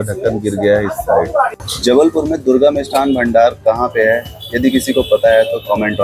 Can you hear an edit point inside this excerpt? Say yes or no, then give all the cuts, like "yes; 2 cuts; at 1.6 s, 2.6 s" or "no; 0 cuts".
yes; 1 cut; at 1.6 s